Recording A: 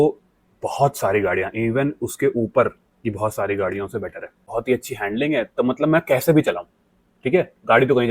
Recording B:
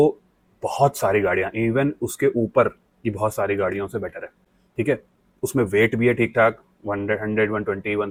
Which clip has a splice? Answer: A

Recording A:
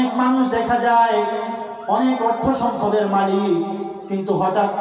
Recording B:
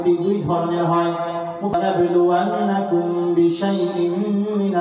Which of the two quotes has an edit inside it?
B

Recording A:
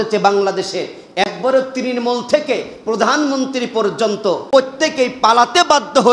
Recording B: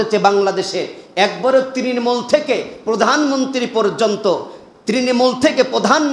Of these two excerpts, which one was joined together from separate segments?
A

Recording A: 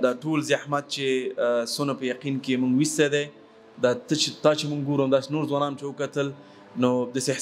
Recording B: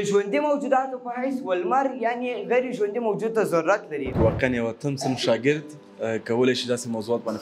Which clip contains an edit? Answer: B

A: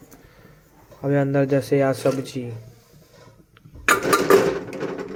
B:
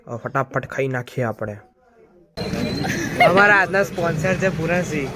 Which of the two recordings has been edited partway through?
B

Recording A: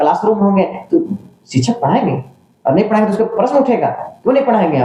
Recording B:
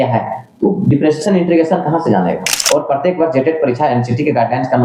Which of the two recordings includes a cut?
B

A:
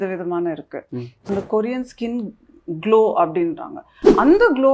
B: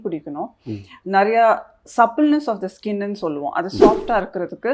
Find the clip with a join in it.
A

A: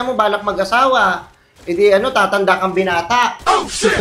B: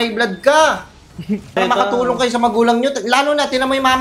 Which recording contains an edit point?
B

